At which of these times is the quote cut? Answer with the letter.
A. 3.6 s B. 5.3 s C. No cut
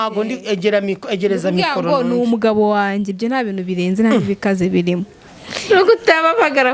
B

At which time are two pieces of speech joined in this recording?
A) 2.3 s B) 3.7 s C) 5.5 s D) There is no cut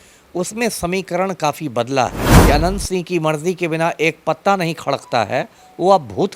A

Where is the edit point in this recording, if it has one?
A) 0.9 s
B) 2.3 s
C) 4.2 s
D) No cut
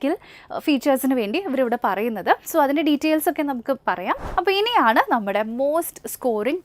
C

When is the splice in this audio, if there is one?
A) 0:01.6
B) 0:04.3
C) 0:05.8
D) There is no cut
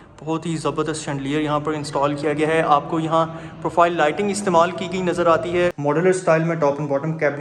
C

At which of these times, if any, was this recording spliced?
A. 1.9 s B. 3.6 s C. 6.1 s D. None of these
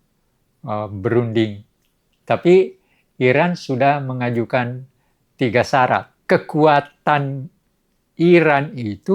C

